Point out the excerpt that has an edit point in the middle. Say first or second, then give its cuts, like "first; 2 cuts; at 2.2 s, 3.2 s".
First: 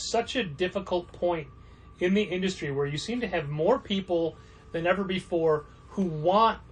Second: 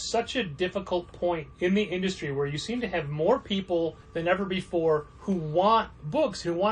second; 3 cuts; at 1.5 s, 4.0 s, 5.1 s